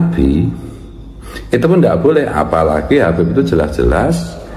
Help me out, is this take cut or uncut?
uncut